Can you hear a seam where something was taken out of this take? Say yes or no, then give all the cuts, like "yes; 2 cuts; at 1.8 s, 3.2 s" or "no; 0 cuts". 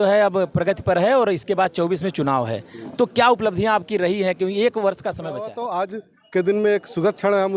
yes; 1 cut; at 5.6 s